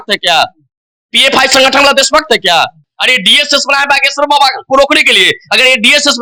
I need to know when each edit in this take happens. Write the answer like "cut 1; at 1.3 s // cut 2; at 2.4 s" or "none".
none